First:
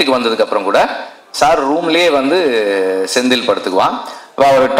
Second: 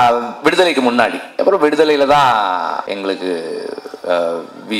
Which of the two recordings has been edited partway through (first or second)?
second